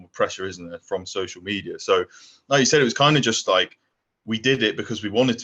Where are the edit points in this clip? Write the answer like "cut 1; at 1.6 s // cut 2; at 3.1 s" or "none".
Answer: none